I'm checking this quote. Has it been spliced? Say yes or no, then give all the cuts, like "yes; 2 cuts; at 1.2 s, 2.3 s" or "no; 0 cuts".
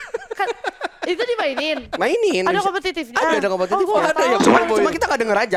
no; 0 cuts